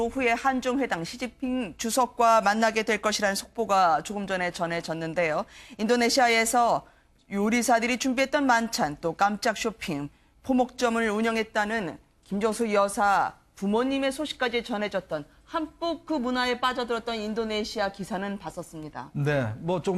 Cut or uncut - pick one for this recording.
cut